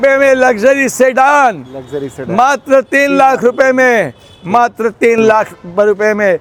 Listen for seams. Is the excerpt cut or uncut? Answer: uncut